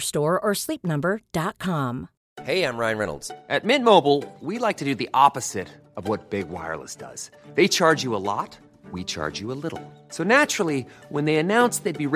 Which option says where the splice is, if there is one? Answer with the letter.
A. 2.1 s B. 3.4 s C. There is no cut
A